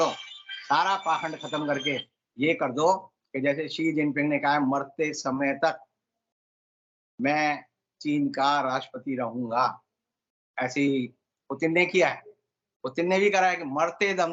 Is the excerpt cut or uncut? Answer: uncut